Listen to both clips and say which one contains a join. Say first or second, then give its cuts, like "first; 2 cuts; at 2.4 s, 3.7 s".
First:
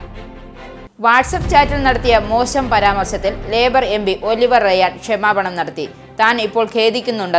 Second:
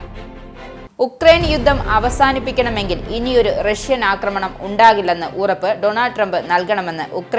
second; 1 cut; at 0.9 s